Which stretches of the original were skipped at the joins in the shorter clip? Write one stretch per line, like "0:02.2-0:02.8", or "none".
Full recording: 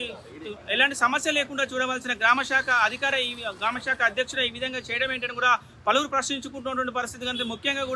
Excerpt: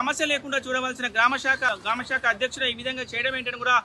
0:02.7-0:03.4